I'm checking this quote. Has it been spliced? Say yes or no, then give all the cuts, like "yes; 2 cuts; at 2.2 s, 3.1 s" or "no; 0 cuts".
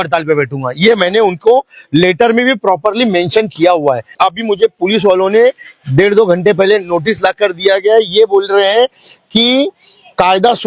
yes; 1 cut; at 4.1 s